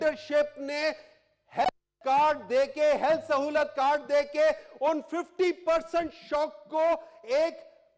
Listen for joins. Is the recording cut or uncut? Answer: uncut